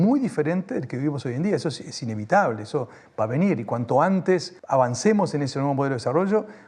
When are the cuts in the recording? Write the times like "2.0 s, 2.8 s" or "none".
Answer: 4.5 s